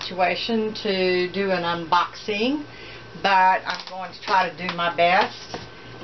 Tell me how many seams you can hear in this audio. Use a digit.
0